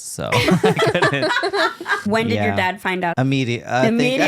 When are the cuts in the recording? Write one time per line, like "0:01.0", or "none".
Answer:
0:02.0
0:03.1